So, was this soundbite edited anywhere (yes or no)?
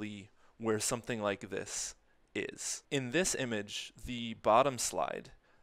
yes